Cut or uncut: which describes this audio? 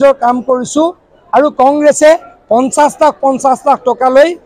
uncut